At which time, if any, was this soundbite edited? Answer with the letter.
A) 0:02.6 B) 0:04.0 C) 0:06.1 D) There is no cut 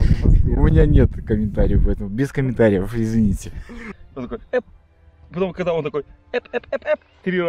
B